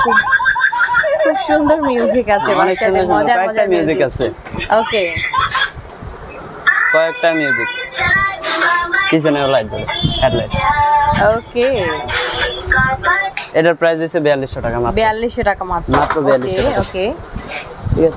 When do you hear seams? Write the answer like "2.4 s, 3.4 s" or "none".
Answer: none

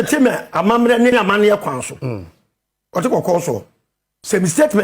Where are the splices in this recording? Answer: 1.1 s

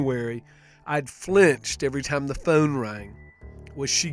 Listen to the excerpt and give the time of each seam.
none

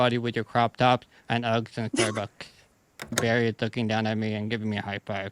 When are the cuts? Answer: 3.2 s

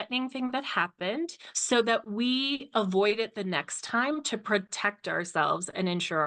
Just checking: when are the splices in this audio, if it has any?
none

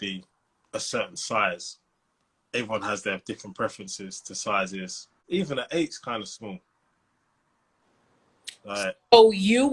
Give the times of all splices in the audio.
5.2 s

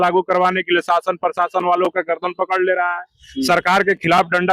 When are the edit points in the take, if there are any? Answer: none

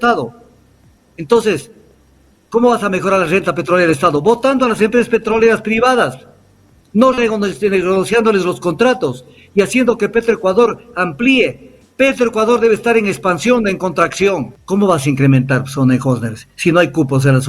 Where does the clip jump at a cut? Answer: 14.5 s

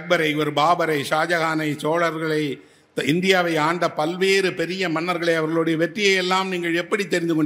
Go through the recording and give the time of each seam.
none

